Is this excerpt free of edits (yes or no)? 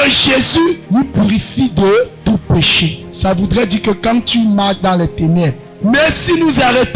no